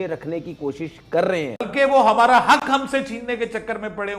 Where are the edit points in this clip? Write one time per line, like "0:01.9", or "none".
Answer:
0:01.6